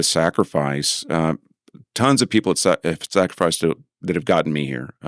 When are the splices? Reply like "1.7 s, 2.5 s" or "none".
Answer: none